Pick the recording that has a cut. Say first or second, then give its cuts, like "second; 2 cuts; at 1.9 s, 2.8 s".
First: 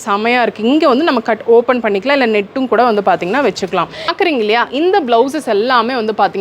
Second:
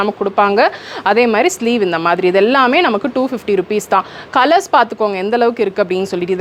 first; 1 cut; at 4.1 s